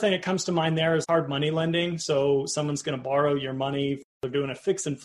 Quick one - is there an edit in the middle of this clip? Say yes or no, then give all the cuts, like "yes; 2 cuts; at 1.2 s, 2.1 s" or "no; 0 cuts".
yes; 2 cuts; at 1.0 s, 4.1 s